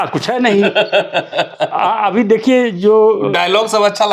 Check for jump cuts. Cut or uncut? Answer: uncut